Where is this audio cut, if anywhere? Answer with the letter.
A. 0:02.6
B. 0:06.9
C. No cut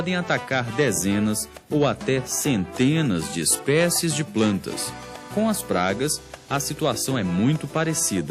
A